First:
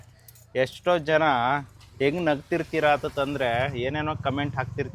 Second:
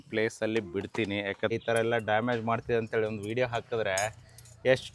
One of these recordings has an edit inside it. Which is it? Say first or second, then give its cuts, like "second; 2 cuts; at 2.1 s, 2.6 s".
second; 1 cut; at 1.5 s